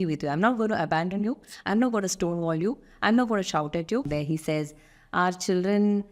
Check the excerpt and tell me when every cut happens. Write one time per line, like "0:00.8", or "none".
0:04.1